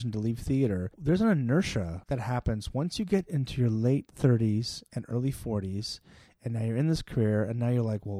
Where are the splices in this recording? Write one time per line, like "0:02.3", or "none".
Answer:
0:00.9
0:02.0